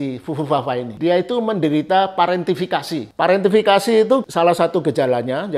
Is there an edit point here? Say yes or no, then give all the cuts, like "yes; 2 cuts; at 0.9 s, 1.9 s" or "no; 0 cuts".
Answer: yes; 3 cuts; at 0.9 s, 3.1 s, 4.2 s